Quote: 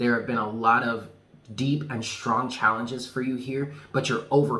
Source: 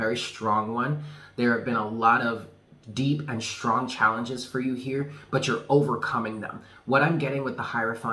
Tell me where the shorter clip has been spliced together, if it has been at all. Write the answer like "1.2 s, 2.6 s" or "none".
none